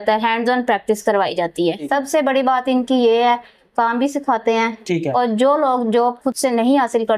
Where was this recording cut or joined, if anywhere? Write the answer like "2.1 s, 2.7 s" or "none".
1.8 s